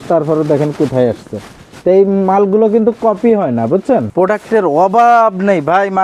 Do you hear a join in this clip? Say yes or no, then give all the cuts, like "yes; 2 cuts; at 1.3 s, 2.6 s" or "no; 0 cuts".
yes; 1 cut; at 4.1 s